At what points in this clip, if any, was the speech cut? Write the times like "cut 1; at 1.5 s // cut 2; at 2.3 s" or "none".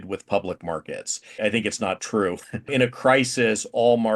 cut 1; at 1.4 s // cut 2; at 2.7 s